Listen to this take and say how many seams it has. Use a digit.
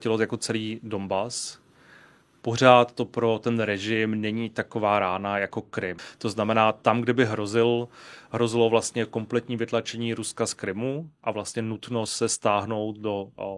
1